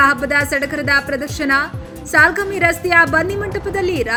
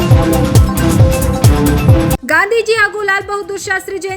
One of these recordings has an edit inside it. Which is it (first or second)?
second